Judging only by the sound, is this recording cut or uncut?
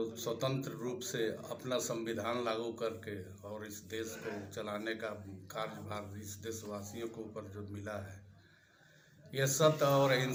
uncut